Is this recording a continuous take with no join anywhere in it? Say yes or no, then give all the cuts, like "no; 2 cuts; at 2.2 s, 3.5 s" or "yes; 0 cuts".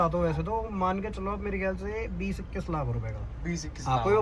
yes; 0 cuts